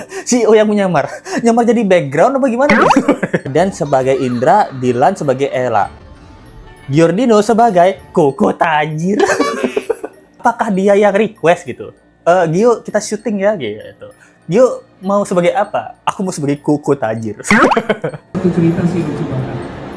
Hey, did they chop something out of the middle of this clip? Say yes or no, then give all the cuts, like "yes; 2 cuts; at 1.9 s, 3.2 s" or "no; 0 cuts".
yes; 3 cuts; at 3.5 s, 10.4 s, 18.4 s